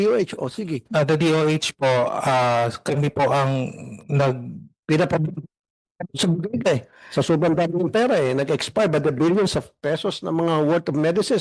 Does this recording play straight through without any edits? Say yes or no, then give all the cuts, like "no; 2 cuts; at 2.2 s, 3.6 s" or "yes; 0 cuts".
yes; 0 cuts